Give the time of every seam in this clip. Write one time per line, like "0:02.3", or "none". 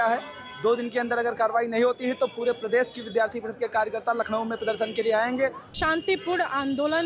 0:05.7

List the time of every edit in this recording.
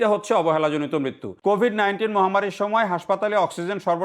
0:01.2

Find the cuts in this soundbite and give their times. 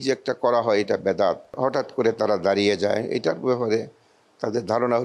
0:01.5

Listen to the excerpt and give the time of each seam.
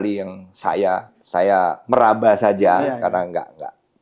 0:01.2

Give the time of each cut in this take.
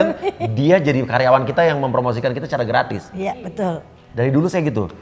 none

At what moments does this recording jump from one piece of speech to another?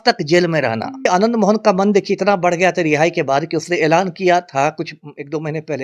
0:01.0

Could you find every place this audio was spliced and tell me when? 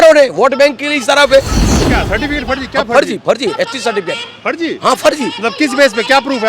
0:01.9

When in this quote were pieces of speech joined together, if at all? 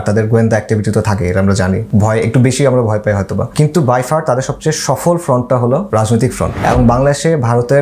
0:01.8
0:03.5
0:06.1

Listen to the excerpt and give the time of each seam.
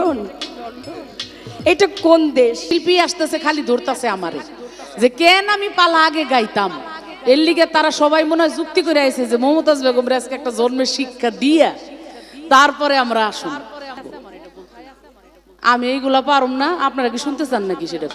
0:02.7
0:14.1

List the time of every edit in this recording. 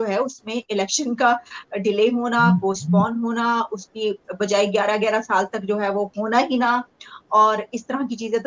none

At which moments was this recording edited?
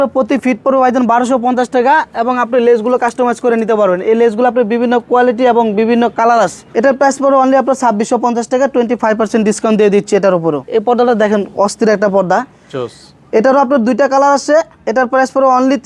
0:06.6
0:10.6

